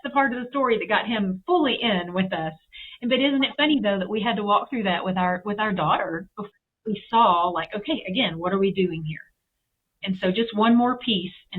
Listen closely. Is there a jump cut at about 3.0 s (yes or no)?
no